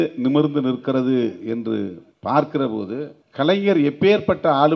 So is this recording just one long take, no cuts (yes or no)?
no